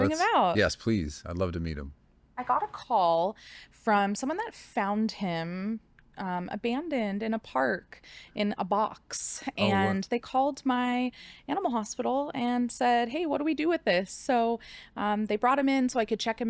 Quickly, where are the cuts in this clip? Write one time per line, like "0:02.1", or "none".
0:02.2